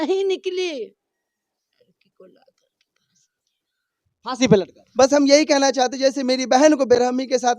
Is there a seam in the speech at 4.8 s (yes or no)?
yes